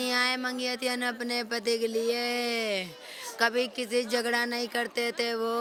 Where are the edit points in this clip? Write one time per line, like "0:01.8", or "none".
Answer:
none